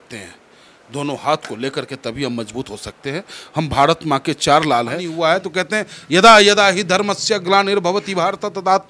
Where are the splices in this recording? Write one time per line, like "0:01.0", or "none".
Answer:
0:05.0